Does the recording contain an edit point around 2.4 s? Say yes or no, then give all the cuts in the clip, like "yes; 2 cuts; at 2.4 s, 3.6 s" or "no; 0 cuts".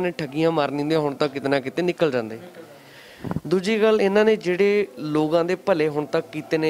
no; 0 cuts